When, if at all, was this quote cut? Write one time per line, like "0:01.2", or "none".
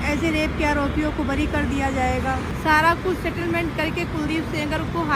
0:02.5